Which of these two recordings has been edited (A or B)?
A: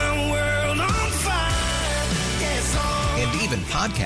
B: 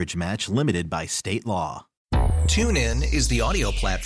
B